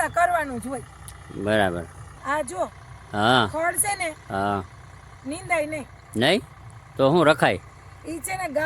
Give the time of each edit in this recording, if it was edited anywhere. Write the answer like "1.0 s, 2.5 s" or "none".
2.0 s